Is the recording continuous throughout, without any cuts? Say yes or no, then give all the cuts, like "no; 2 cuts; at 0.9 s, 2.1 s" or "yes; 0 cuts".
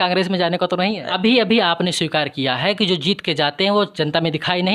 no; 1 cut; at 1.0 s